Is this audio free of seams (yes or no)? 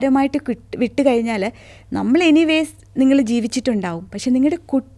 yes